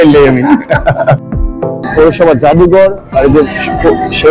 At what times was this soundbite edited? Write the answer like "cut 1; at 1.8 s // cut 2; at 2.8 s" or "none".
cut 1; at 1.6 s